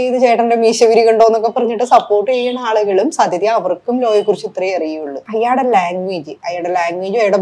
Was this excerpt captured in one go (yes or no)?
no